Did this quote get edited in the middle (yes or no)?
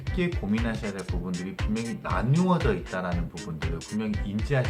no